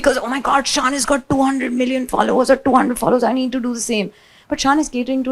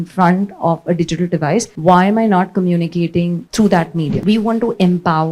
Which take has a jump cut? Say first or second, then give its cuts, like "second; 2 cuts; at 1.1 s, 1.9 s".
second; 3 cuts; at 1.7 s, 3.4 s, 4.2 s